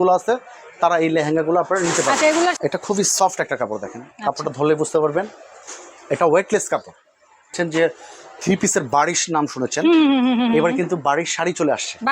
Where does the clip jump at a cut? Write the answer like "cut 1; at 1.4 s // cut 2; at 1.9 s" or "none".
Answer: cut 1; at 2.6 s // cut 2; at 7.5 s